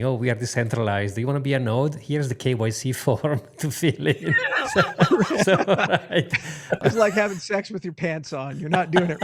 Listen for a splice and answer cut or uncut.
uncut